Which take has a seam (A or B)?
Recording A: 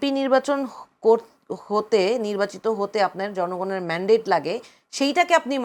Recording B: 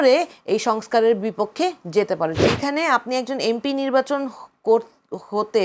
B